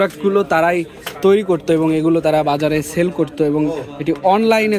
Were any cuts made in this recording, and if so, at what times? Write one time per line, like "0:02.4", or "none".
none